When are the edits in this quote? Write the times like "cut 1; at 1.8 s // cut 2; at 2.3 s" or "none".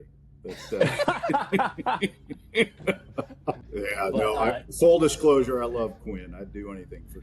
cut 1; at 3.6 s

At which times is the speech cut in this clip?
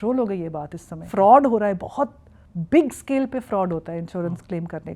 cut 1; at 0.9 s

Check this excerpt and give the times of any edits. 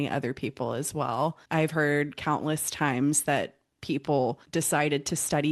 cut 1; at 1.4 s // cut 2; at 4.4 s

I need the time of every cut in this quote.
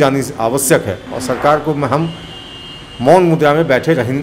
none

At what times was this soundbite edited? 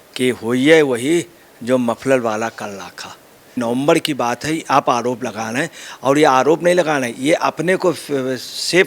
cut 1; at 3.6 s

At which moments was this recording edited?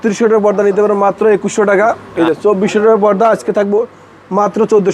cut 1; at 2.0 s

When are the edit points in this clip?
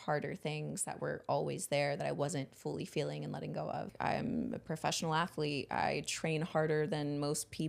cut 1; at 3.9 s

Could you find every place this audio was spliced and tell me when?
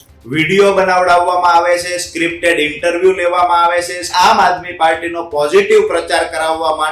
cut 1; at 4.1 s

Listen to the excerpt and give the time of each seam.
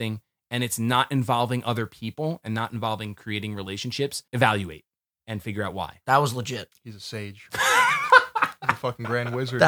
cut 1; at 4.2 s // cut 2; at 6.0 s

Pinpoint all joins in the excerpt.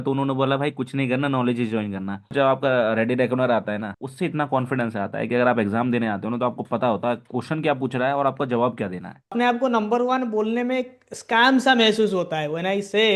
cut 1; at 2.3 s // cut 2; at 4.0 s // cut 3; at 9.3 s

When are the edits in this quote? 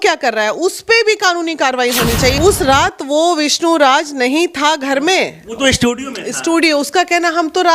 cut 1; at 2.4 s

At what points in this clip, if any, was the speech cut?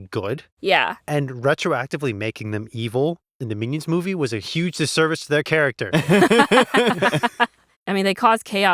cut 1; at 7.7 s

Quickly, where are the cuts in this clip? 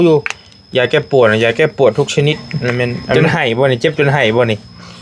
cut 1; at 3.1 s

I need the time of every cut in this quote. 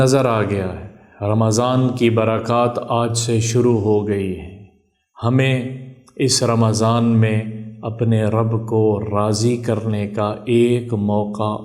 none

